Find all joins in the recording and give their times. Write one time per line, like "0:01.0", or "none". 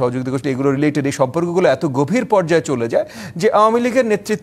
none